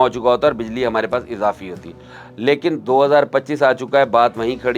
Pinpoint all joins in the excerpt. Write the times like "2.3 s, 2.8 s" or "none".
none